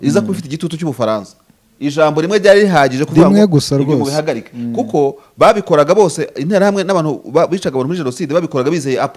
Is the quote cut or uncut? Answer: uncut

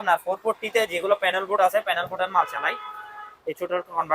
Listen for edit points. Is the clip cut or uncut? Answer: uncut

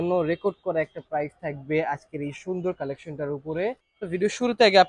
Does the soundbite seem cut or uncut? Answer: cut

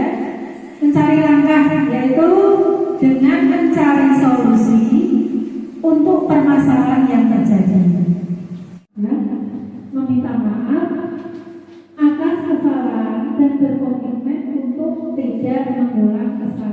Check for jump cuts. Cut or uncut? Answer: uncut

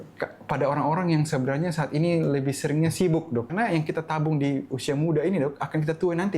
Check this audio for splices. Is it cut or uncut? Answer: cut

